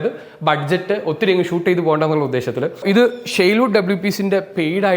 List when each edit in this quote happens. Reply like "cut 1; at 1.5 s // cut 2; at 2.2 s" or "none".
cut 1; at 2.8 s